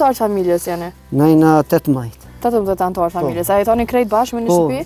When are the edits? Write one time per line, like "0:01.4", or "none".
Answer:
none